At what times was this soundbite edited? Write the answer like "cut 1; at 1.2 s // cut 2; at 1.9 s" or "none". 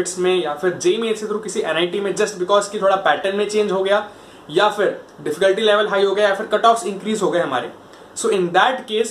none